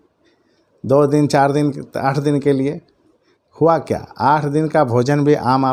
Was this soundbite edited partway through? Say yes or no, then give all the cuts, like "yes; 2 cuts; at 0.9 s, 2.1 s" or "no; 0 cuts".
no; 0 cuts